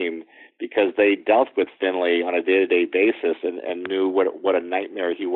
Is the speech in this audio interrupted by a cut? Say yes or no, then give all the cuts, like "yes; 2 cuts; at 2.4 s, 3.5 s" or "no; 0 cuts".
no; 0 cuts